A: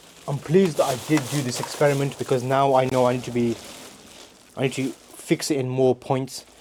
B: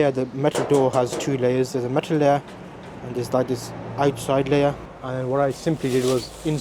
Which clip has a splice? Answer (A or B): B